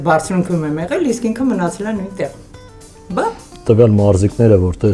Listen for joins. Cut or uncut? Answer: cut